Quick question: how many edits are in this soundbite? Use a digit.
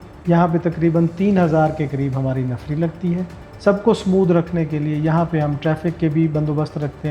1